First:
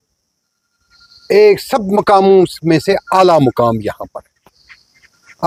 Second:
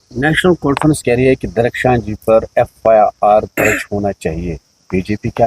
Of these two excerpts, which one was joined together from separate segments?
second; 1 cut; at 1.0 s

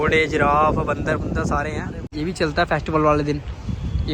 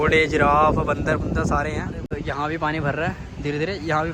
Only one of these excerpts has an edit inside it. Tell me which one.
first; 1 cut; at 2.0 s

